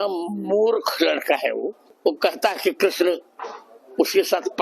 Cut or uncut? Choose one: cut